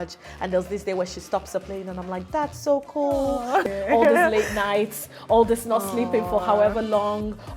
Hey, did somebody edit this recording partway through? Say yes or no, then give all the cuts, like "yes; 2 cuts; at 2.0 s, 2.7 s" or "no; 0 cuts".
yes; 1 cut; at 3.6 s